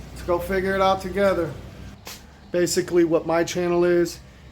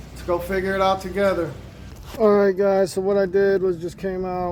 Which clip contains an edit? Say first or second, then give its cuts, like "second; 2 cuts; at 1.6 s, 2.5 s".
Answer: first; 1 cut; at 2.0 s